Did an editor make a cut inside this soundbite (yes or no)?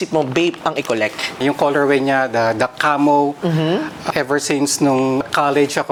no